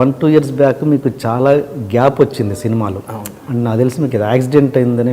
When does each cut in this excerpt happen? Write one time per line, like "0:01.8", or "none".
none